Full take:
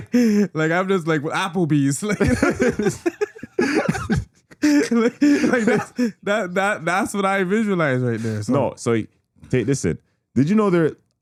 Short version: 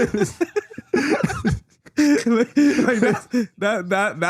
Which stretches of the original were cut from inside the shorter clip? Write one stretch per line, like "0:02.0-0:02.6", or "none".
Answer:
none